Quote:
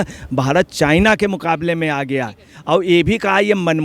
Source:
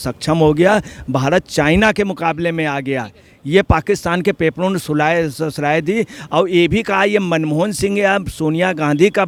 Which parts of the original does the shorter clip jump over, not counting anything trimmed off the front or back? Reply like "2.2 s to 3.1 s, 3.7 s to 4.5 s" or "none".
3.3 s to 6.2 s